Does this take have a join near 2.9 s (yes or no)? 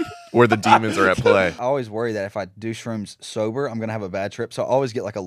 no